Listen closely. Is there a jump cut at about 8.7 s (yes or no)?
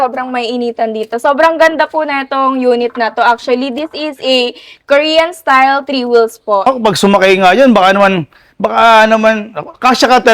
no